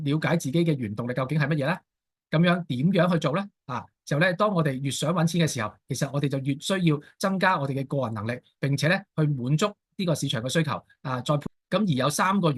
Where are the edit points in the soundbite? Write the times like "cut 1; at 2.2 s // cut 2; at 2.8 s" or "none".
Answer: cut 1; at 11.4 s

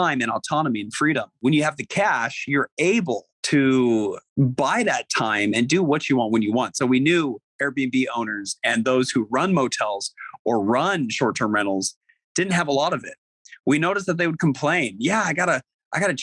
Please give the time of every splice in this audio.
cut 1; at 1.3 s // cut 2; at 3.3 s // cut 3; at 4.2 s

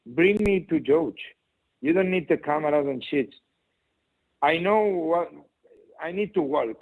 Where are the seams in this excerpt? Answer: none

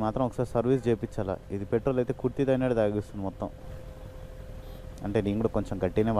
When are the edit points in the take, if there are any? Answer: none

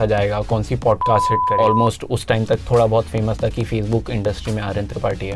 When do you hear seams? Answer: cut 1; at 1.5 s

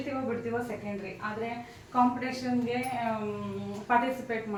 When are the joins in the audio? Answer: none

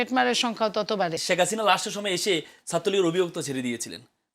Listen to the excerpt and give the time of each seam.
cut 1; at 1.2 s

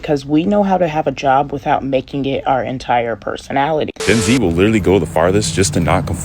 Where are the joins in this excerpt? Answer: cut 1; at 4.0 s

